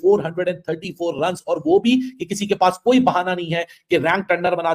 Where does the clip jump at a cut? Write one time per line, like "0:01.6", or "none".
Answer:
none